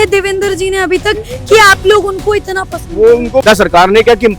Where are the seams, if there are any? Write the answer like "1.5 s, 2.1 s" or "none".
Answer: 3.4 s